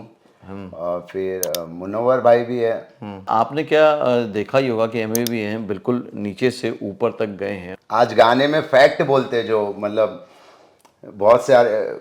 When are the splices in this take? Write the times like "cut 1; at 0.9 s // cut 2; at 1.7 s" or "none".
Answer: cut 1; at 3.3 s // cut 2; at 7.7 s